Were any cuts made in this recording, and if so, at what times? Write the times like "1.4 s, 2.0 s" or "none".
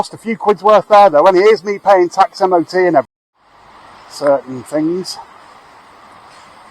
3.1 s